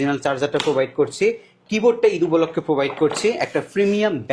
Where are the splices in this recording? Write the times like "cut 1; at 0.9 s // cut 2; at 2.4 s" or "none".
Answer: none